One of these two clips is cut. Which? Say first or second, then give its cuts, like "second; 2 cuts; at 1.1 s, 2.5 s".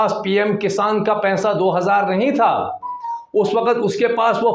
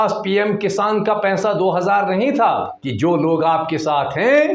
second; 1 cut; at 2.8 s